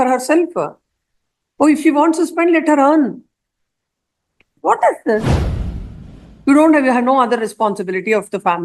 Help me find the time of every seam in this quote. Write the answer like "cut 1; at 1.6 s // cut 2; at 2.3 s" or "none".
cut 1; at 4.5 s